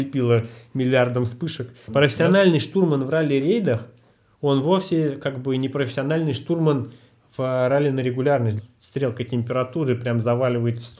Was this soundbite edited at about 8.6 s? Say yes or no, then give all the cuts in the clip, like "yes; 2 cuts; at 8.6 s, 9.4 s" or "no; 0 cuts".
yes; 2 cuts; at 1.7 s, 8.6 s